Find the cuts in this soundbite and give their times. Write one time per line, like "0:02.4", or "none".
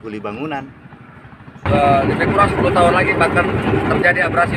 0:01.7